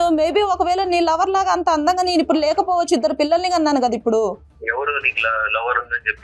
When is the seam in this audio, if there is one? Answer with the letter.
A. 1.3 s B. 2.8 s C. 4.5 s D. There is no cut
C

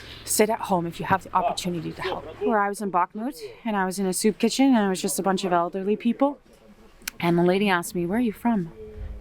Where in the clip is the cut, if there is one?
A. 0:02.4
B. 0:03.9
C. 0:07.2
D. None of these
A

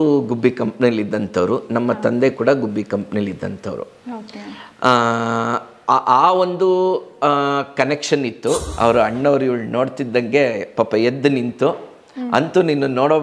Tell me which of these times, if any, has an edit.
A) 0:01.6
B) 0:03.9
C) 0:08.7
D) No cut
C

